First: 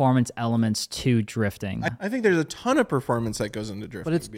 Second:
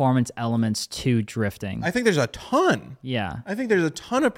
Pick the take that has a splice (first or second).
first